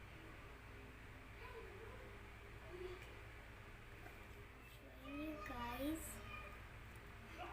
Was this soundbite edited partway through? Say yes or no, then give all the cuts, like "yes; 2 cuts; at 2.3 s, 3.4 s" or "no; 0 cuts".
yes; 1 cut; at 4.9 s